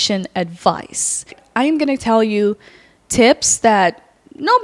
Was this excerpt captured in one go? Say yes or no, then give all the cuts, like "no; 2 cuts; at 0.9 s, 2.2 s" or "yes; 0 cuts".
no; 1 cut; at 1.4 s